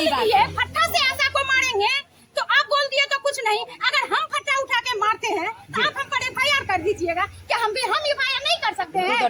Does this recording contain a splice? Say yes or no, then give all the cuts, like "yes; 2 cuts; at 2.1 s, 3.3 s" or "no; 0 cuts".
no; 0 cuts